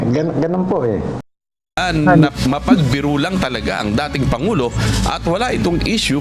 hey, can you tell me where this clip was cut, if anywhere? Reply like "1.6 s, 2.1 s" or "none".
1.2 s